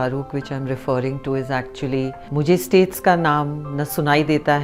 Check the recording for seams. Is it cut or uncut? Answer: cut